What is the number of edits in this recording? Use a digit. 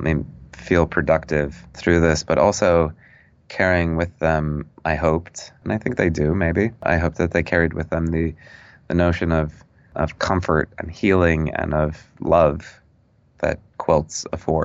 1